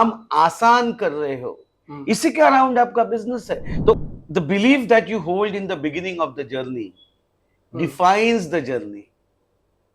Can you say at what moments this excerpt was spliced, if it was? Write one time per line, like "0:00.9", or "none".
0:04.1